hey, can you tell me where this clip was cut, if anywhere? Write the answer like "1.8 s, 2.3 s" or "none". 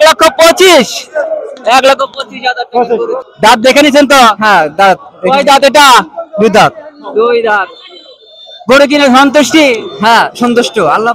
3.2 s